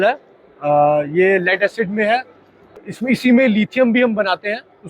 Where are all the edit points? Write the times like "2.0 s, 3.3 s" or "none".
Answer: 2.7 s